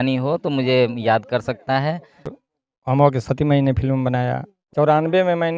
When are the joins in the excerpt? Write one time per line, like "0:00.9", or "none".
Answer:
0:02.2
0:04.6